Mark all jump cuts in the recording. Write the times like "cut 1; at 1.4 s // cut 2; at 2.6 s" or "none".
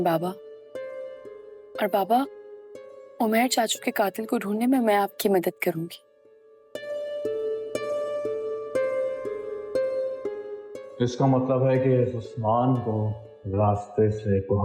none